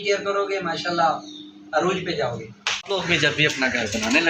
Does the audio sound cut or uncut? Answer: cut